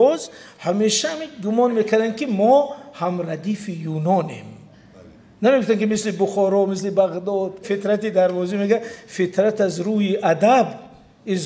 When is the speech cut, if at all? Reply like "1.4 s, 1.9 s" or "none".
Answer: 7.7 s